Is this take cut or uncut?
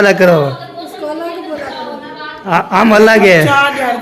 uncut